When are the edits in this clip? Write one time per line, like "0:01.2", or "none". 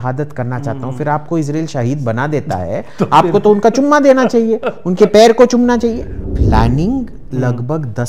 0:06.2